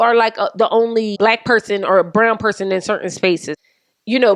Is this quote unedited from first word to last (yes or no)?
no